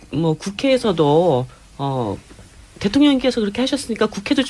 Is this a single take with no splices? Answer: yes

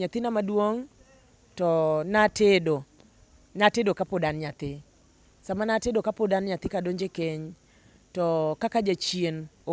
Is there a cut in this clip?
no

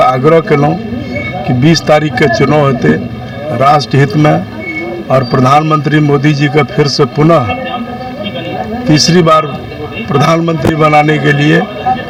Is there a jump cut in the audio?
no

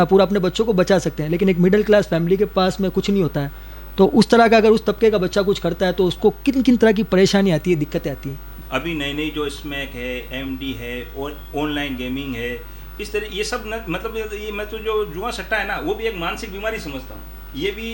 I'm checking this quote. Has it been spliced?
no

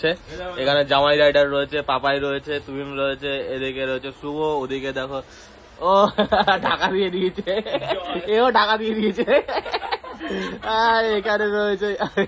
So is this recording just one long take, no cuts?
yes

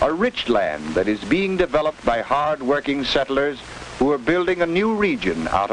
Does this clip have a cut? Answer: no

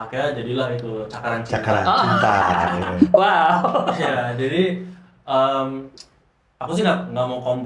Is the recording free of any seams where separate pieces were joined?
yes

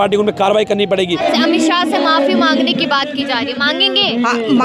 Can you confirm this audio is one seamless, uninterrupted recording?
no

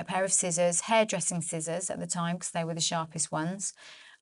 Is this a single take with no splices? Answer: yes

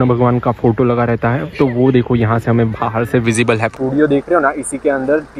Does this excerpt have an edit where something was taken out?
yes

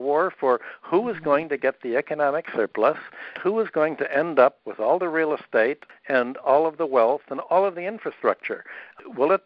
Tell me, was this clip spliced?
yes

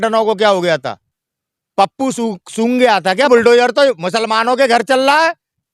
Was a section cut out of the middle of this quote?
yes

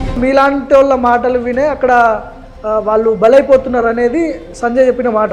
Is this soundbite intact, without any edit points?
yes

